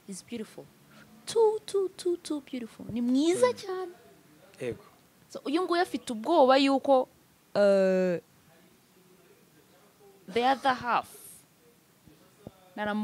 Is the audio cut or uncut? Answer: uncut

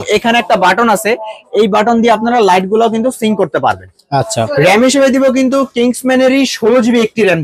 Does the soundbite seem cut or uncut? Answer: cut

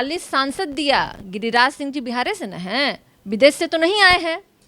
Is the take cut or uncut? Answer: uncut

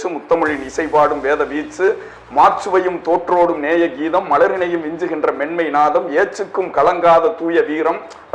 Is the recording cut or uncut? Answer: uncut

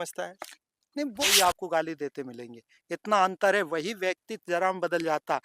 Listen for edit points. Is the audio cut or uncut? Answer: cut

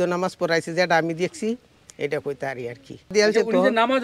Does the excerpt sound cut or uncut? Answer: cut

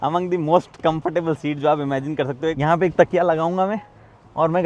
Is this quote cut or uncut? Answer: cut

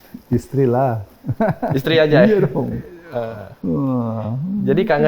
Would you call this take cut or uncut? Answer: uncut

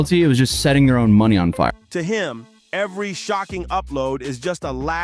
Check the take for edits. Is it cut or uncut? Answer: uncut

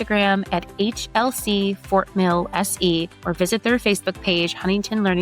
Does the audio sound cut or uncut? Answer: cut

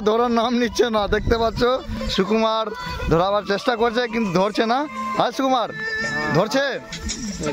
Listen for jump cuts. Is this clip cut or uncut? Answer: uncut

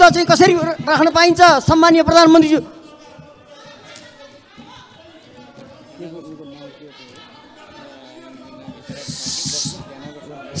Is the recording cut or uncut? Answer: uncut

